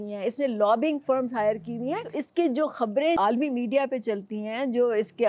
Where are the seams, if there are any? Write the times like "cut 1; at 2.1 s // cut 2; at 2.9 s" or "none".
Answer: cut 1; at 2.2 s // cut 2; at 3.2 s